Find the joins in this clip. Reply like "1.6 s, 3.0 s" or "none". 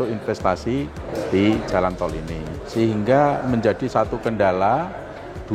2.4 s